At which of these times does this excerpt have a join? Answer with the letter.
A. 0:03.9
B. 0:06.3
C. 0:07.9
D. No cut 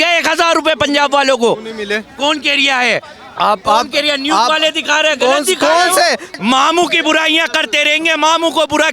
B